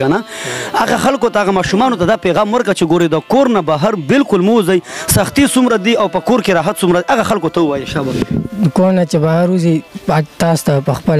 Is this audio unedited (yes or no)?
no